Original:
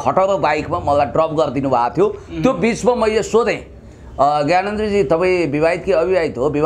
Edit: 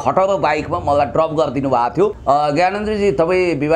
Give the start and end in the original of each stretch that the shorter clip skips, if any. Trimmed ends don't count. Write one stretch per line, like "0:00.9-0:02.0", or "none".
0:02.2-0:04.1

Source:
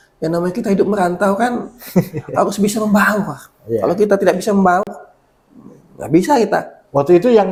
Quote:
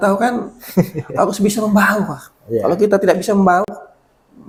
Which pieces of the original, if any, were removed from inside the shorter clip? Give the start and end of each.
none

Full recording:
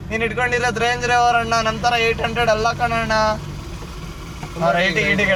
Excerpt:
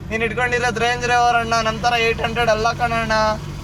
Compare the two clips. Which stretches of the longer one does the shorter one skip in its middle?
none

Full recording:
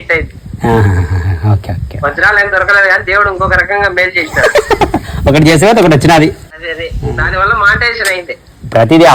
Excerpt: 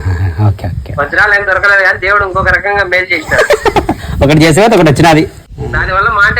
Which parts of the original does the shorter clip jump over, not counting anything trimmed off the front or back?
0:06.5-0:06.9

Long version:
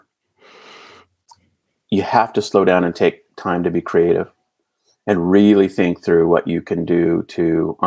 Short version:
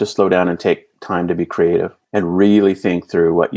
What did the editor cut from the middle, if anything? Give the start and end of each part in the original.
0:04.3-0:04.9

